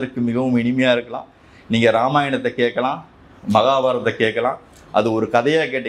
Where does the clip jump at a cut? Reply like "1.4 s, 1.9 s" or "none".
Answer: none